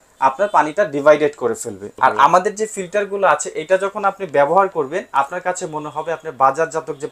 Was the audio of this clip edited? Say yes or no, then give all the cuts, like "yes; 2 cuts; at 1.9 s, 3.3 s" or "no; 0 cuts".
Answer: yes; 1 cut; at 1.9 s